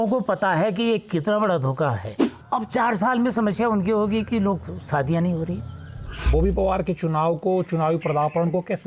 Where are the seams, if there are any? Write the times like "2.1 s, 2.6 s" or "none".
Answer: 2.3 s, 6.3 s